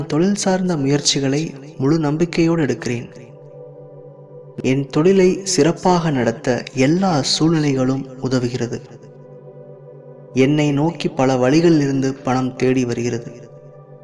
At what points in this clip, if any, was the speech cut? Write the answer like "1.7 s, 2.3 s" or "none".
3.2 s, 4.5 s, 8.9 s, 10.3 s